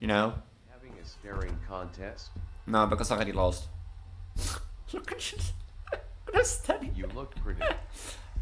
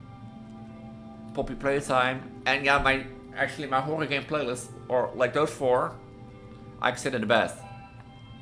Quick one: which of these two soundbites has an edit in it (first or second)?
first